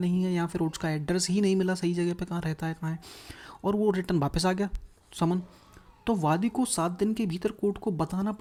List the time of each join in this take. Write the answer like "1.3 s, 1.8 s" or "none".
none

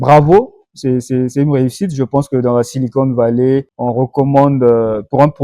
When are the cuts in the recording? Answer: 3.7 s

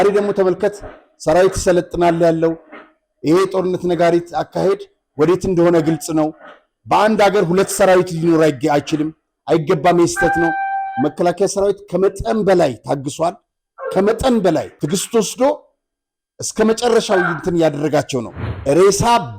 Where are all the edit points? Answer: 14.7 s, 18.3 s

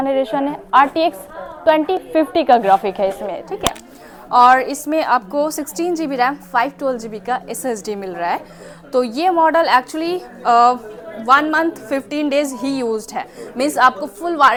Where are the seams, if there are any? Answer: none

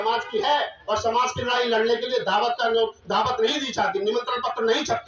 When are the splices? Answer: none

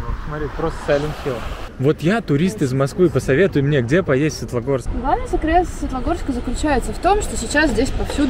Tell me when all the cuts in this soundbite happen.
1.6 s, 4.9 s

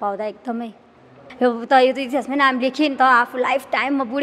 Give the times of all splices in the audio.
1.2 s

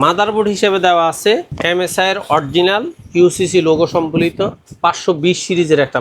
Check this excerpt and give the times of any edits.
1.5 s

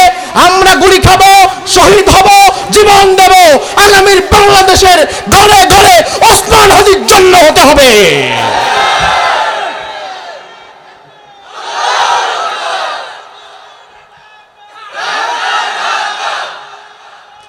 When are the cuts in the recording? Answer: none

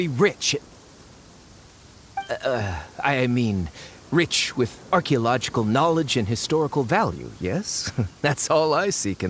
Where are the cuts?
none

